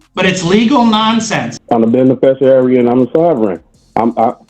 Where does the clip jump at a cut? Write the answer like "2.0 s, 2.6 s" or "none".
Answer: 1.5 s